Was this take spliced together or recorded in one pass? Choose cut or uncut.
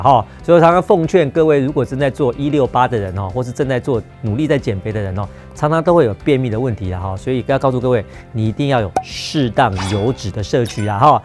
uncut